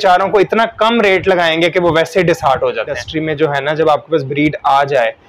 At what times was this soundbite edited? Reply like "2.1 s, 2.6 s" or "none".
3.0 s